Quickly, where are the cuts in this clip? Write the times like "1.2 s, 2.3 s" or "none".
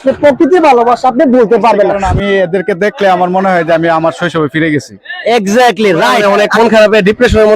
2.0 s, 6.2 s

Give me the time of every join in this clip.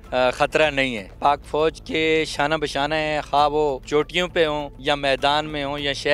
1.1 s, 3.8 s, 4.8 s

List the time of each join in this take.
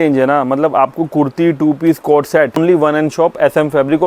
2.6 s

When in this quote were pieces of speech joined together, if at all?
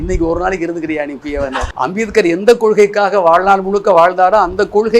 1.6 s

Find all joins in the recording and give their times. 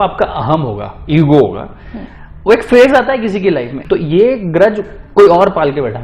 none

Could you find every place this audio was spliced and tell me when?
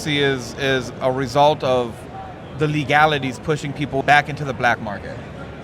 4.0 s

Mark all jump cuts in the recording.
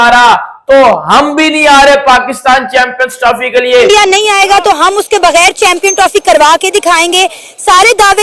3.9 s

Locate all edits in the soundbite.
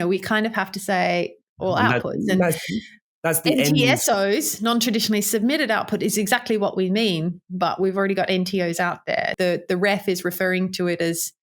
9.3 s

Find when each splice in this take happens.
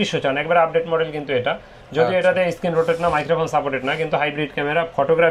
none

